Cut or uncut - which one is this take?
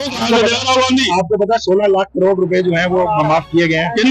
uncut